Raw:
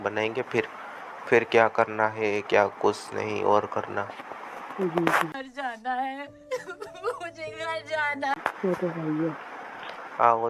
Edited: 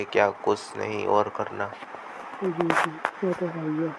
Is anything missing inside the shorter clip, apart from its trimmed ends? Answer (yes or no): yes